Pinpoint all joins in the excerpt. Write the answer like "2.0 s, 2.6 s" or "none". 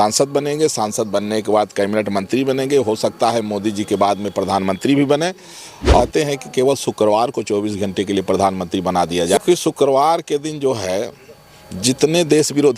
6.0 s, 9.3 s